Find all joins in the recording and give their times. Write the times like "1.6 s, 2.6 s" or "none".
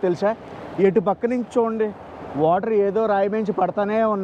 none